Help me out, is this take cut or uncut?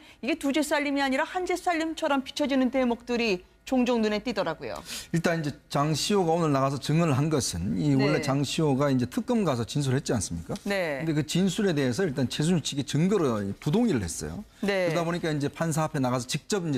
uncut